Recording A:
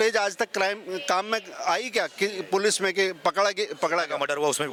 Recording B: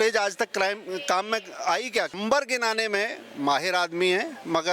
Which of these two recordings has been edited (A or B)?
B